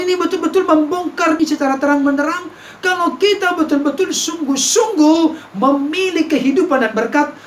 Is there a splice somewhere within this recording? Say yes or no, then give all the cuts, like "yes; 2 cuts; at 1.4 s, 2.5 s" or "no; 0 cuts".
yes; 1 cut; at 1.4 s